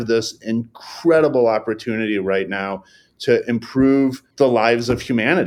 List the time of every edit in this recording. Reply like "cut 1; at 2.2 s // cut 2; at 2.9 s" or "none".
cut 1; at 4.2 s